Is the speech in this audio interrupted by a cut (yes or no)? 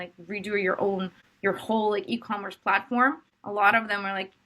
yes